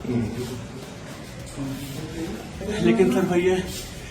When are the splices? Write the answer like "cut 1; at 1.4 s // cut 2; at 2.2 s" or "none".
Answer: cut 1; at 2.6 s